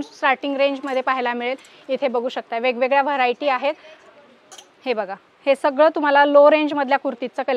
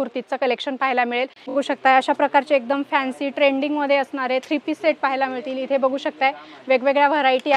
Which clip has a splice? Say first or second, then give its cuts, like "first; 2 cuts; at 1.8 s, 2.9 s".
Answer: second; 1 cut; at 1.5 s